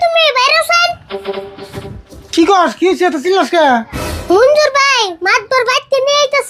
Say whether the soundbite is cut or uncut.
uncut